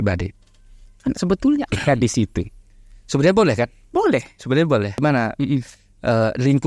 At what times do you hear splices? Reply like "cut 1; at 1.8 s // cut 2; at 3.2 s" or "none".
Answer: cut 1; at 5.0 s

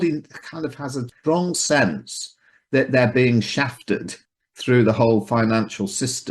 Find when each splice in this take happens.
cut 1; at 1.1 s // cut 2; at 4.1 s

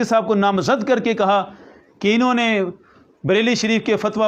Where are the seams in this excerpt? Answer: none

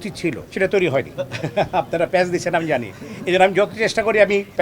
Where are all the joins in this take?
cut 1; at 1.1 s

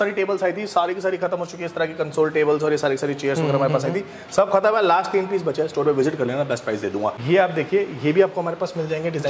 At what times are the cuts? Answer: cut 1; at 7.2 s

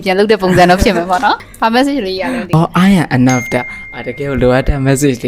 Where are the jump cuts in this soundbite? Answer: cut 1; at 1.5 s // cut 2; at 2.5 s

